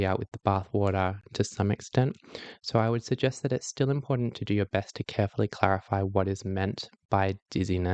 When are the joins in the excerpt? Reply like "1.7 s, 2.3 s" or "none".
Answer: none

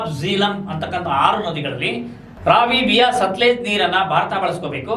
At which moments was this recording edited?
2.2 s

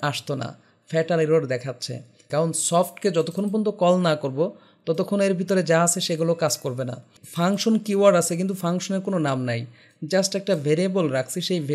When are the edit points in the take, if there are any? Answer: 2.2 s, 7.2 s

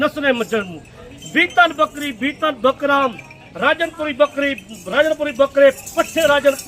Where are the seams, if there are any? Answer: none

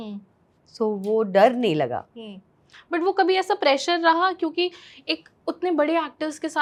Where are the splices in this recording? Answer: none

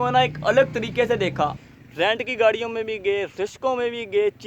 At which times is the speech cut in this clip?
1.6 s

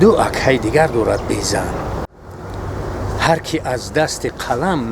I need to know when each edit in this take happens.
2.2 s

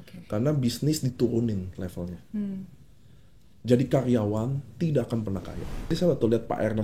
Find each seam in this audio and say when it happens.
5.9 s

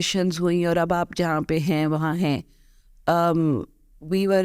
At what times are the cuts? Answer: none

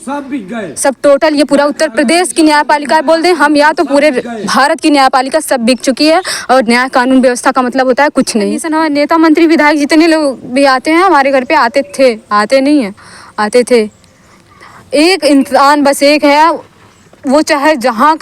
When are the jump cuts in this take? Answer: 8.7 s

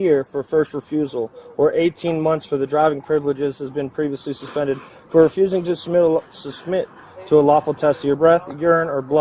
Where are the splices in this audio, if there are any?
none

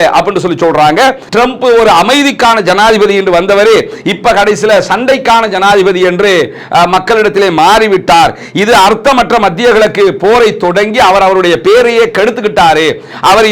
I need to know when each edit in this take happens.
1.2 s

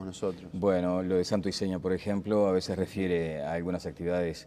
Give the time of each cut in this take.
2.2 s

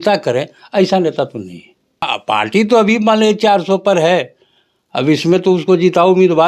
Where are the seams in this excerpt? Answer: 2.1 s

